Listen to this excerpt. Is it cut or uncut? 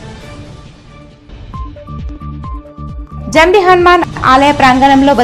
cut